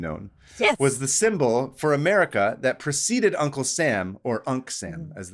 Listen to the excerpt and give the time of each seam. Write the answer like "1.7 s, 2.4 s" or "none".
none

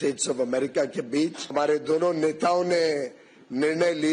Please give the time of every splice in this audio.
1.5 s

